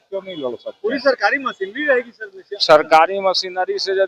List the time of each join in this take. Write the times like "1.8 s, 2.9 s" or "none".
none

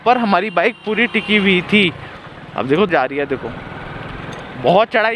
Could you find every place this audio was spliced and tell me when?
2.9 s

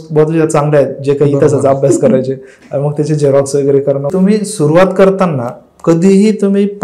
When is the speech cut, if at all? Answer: 4.1 s

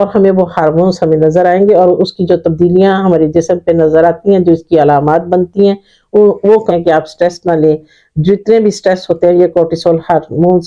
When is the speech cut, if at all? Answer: 6.7 s

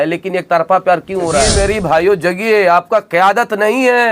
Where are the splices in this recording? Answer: 1.5 s

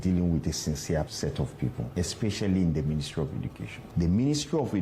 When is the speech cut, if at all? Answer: 1.5 s, 3.8 s

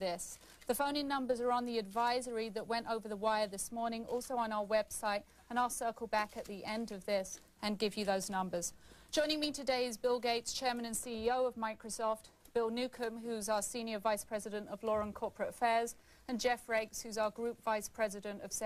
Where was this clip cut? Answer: none

